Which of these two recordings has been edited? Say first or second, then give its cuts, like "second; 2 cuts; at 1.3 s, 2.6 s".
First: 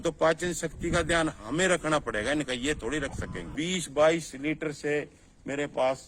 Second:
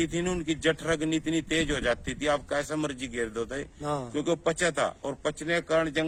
first; 1 cut; at 3.5 s